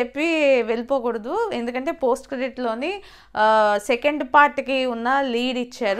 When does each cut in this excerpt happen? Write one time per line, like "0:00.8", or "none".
none